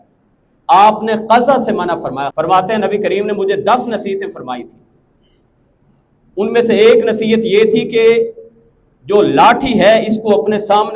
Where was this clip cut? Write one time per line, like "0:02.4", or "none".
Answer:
0:02.2